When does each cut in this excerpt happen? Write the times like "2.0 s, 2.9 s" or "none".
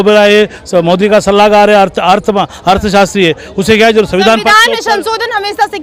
none

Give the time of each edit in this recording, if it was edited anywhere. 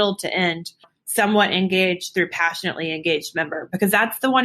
1.0 s

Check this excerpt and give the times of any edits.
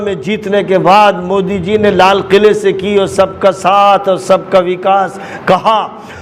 none

